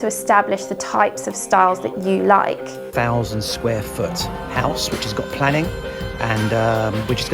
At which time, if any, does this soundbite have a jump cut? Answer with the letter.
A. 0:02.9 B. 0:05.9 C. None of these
A